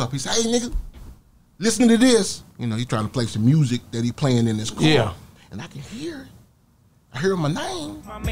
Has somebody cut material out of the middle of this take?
no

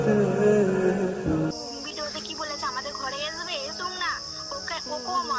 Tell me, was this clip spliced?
yes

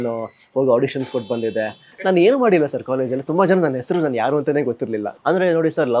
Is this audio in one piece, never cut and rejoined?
no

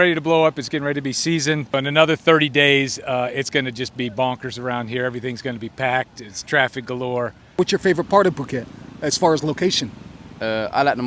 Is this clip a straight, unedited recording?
no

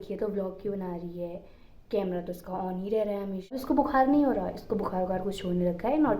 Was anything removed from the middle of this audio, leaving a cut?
yes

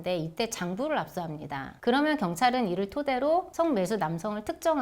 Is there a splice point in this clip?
yes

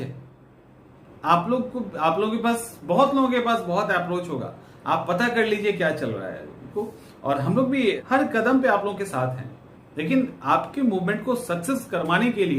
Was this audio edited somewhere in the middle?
yes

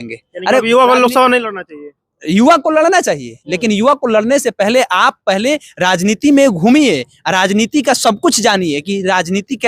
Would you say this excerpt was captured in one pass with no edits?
yes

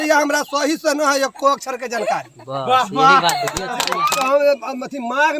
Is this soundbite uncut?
yes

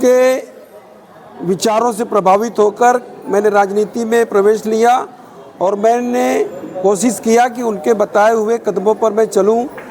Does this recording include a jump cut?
no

